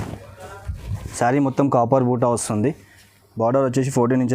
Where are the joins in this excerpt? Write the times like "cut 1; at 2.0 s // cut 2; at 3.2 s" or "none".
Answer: cut 1; at 1.0 s